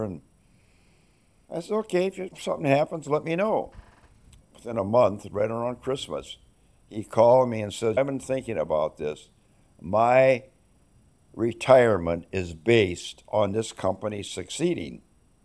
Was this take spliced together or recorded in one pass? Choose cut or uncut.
uncut